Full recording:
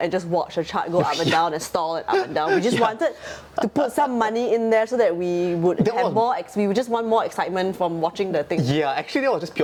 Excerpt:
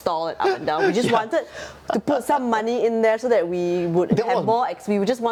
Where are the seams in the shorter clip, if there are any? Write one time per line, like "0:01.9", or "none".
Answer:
none